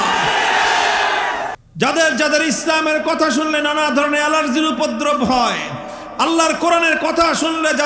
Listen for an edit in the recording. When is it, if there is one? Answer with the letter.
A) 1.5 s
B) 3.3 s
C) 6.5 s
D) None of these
A